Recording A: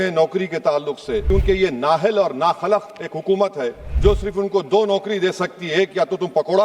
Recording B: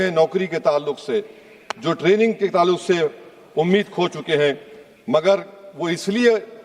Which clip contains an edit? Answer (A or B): A